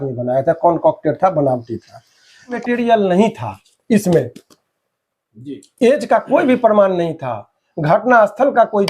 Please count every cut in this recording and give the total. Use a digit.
1